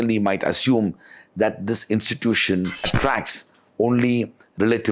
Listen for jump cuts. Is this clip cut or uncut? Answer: cut